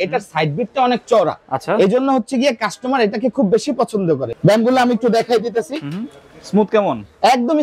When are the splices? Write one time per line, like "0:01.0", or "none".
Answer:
0:04.3